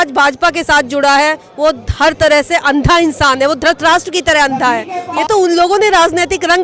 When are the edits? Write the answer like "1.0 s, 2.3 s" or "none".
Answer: 5.0 s